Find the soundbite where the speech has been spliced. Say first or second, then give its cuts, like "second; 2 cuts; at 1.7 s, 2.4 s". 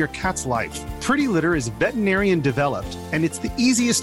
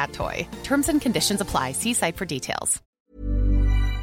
second; 1 cut; at 2.9 s